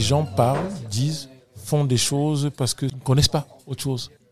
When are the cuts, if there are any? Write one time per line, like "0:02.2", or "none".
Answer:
0:02.9